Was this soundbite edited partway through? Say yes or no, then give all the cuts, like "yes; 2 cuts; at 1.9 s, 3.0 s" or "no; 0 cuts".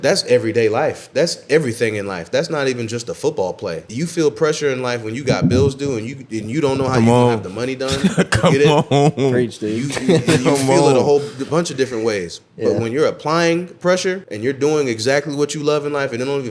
yes; 2 cuts; at 3.8 s, 14.3 s